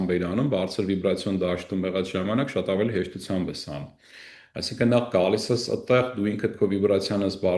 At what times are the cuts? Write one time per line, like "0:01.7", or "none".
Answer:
none